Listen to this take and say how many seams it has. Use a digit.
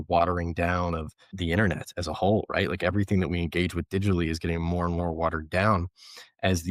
1